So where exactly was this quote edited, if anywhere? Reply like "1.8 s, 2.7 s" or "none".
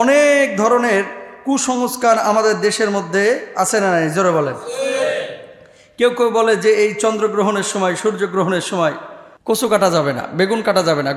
none